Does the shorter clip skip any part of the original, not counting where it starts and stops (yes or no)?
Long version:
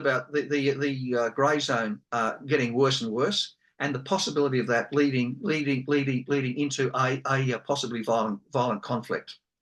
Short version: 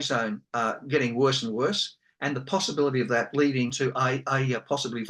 yes